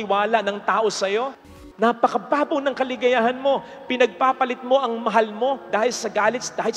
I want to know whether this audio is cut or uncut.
cut